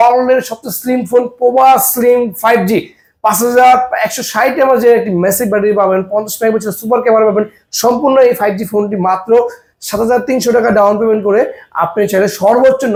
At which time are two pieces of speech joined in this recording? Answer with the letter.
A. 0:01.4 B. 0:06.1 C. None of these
C